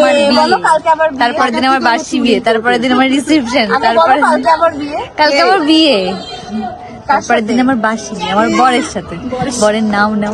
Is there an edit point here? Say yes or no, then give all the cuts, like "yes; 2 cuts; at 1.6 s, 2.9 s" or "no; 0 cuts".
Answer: no; 0 cuts